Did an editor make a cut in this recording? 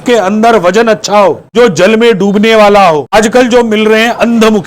yes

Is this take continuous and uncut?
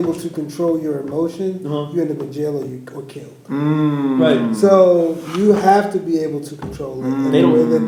yes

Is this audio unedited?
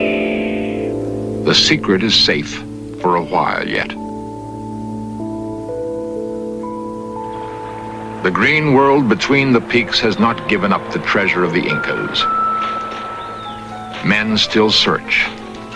no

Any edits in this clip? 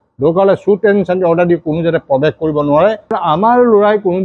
yes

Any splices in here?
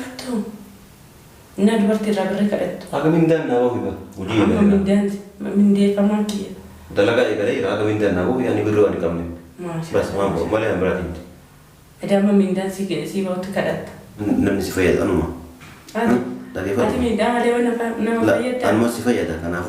yes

